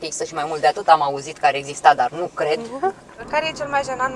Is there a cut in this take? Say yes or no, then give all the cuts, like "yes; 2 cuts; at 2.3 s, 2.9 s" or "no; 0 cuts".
yes; 1 cut; at 3.1 s